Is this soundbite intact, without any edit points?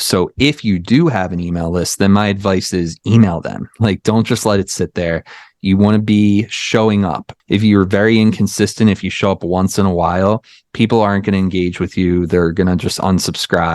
no; 1 cut; at 7.3 s

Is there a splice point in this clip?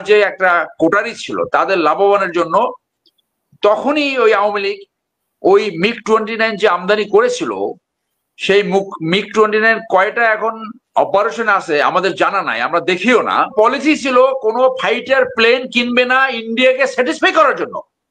yes; 1 cut; at 13.5 s

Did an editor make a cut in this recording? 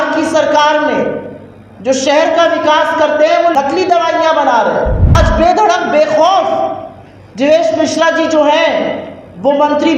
yes; 2 cuts; at 3.5 s, 5.2 s

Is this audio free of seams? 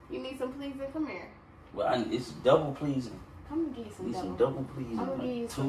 yes; 0 cuts

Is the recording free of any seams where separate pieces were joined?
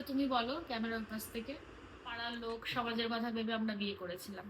no; 1 cut; at 2.3 s

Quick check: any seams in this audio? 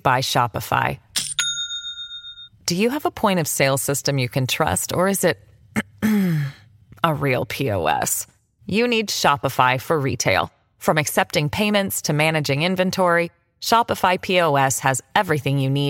no; 0 cuts

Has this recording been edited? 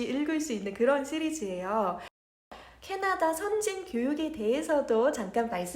yes; 1 cut; at 2.4 s

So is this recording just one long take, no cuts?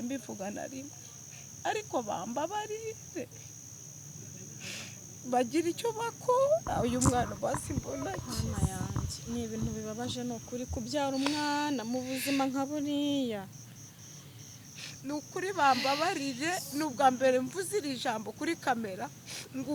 yes; 0 cuts

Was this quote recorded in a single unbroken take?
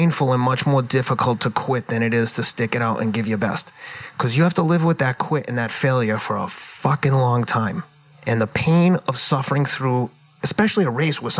yes; 0 cuts

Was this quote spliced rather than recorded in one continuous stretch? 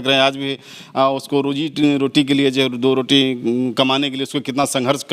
no; 0 cuts

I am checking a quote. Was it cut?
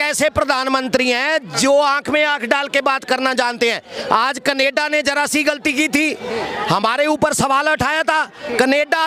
no; 0 cuts

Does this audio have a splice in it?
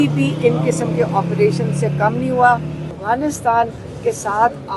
yes; 1 cut; at 3.0 s

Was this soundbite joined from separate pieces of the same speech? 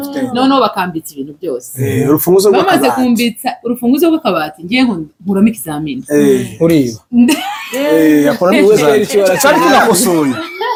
no; 0 cuts

